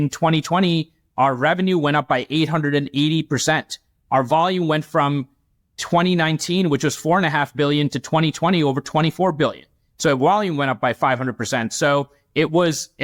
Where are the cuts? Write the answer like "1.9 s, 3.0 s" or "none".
none